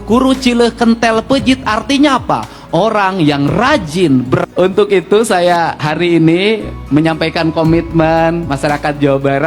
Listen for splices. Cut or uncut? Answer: cut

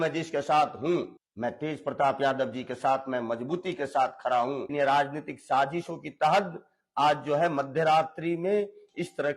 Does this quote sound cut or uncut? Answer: cut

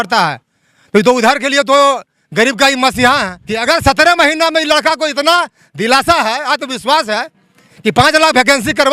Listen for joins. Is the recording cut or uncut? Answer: cut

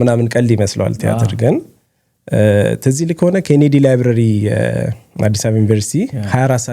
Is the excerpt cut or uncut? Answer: uncut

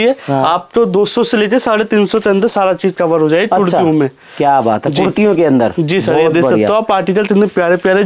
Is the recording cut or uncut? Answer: uncut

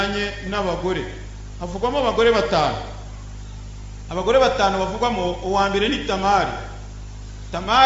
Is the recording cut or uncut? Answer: uncut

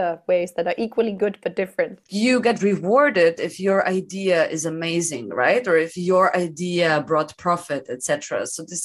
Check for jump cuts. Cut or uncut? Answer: cut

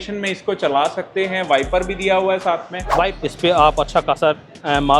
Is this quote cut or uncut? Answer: cut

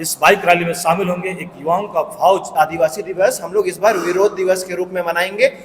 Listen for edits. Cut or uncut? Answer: cut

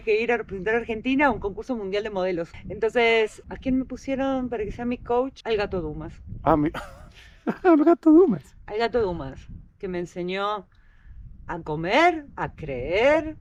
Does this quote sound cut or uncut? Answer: uncut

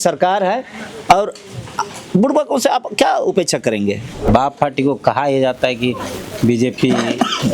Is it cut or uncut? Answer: cut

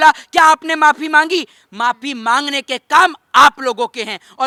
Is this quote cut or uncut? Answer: uncut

